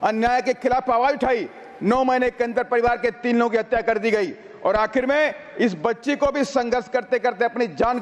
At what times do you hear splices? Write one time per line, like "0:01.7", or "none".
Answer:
none